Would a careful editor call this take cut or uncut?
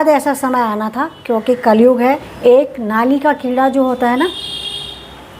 cut